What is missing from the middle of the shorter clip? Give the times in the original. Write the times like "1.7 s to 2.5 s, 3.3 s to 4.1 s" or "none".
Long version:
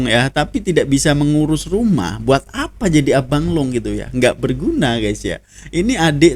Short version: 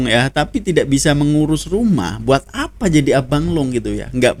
none